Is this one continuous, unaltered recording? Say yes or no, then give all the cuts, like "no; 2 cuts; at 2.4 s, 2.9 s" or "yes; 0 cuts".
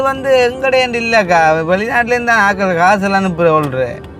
yes; 0 cuts